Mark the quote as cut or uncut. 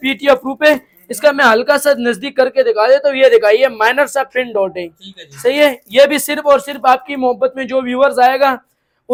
uncut